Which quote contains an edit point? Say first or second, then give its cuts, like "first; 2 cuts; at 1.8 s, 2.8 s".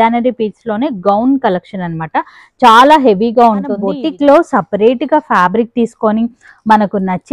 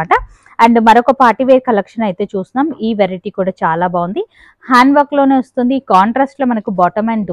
first; 1 cut; at 3.9 s